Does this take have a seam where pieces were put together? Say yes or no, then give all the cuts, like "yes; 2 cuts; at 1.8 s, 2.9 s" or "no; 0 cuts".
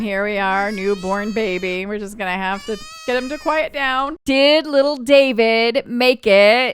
yes; 1 cut; at 4.1 s